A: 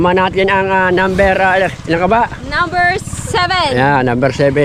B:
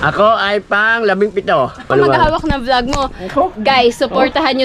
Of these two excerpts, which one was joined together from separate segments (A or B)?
B